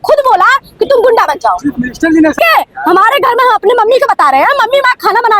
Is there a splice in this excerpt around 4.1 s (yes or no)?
no